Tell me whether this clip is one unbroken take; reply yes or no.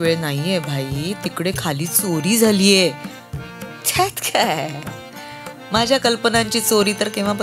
yes